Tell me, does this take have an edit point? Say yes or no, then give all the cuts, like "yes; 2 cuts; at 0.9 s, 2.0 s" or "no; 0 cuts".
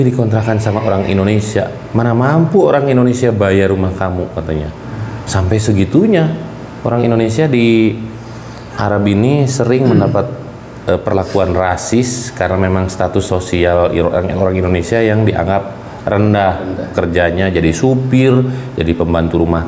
no; 0 cuts